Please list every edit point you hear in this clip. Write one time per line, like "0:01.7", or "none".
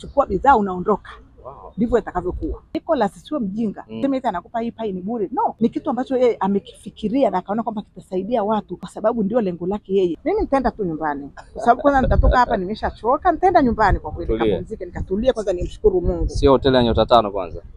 0:02.8
0:03.9
0:05.6
0:08.8
0:10.2

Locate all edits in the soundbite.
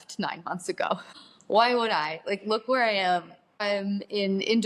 none

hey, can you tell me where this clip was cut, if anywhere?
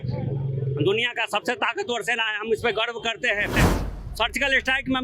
0:03.7

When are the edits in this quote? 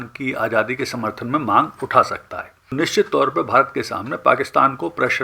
0:02.7

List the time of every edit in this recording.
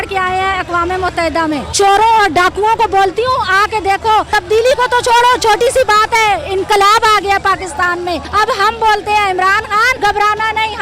0:01.7
0:04.3
0:08.3
0:09.9

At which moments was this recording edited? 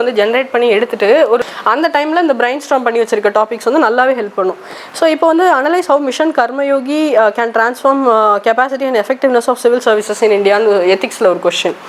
0:01.4

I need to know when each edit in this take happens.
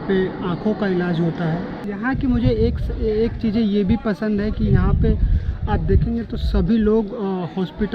0:01.8

